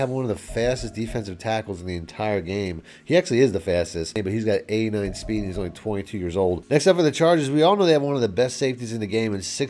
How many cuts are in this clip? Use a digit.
2